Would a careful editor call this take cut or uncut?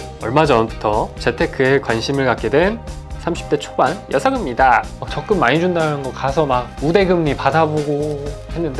cut